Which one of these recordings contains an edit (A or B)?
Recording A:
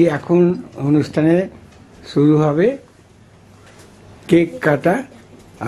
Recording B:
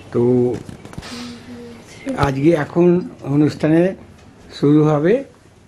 B